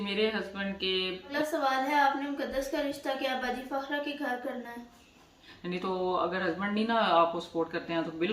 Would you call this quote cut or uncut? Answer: cut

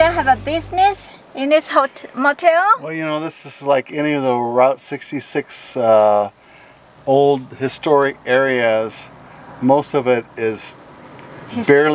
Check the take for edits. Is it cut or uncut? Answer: uncut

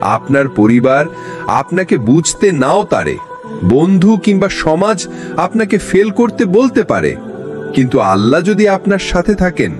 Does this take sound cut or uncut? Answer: uncut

